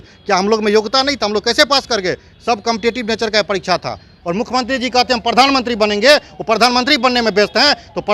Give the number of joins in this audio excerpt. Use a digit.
1